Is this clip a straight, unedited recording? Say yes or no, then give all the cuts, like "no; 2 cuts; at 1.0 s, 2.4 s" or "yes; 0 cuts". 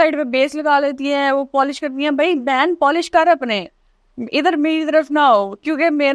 yes; 0 cuts